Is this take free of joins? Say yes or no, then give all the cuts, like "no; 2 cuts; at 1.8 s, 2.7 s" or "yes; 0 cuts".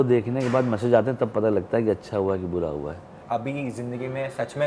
no; 1 cut; at 3.1 s